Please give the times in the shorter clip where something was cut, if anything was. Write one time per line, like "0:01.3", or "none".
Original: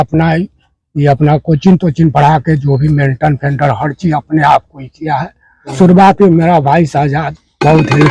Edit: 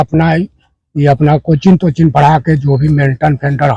none